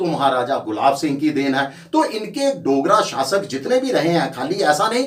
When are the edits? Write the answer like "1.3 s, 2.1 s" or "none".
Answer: none